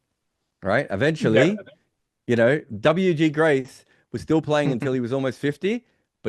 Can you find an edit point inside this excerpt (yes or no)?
no